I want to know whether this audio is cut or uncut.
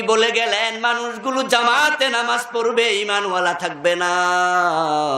uncut